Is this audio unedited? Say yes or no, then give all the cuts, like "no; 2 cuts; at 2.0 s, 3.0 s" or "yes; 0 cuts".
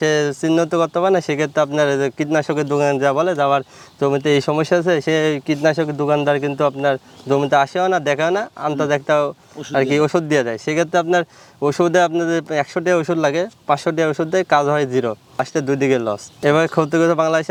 yes; 0 cuts